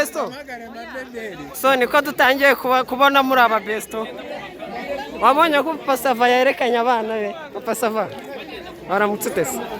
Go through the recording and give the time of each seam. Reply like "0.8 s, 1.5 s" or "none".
none